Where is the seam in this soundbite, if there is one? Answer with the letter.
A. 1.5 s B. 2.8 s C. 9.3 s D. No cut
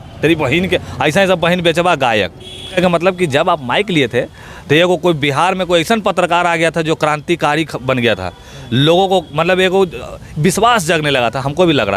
B